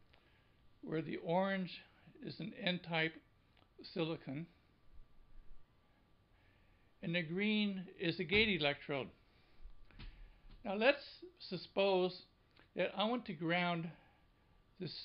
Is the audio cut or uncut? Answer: cut